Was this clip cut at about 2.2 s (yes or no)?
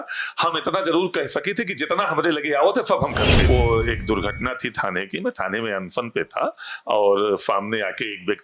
no